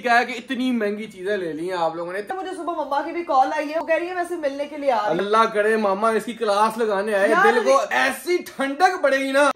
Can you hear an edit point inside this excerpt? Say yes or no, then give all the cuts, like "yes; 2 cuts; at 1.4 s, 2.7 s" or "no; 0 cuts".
yes; 3 cuts; at 2.3 s, 3.8 s, 5.2 s